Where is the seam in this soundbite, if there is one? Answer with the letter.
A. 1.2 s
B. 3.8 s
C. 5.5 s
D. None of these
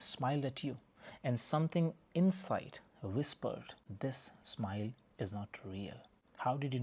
B